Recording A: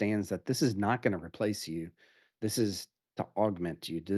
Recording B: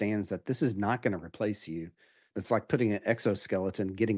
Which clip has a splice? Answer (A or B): B